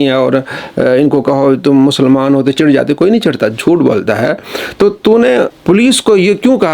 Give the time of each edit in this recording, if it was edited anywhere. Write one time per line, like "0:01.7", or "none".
0:05.6